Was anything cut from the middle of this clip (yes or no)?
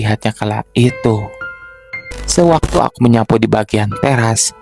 yes